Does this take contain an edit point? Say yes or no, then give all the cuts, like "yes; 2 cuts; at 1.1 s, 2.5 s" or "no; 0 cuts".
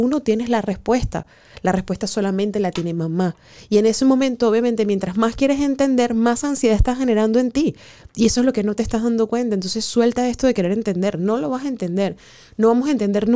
no; 0 cuts